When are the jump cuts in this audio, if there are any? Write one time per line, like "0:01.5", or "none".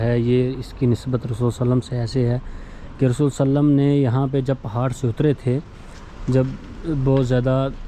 none